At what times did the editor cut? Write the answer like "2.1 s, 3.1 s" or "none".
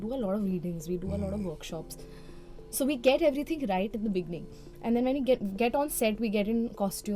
none